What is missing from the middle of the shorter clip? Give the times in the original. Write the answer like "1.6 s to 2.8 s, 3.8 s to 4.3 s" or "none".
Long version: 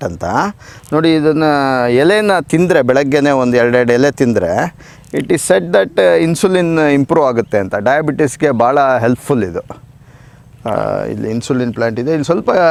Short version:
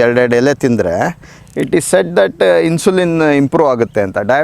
none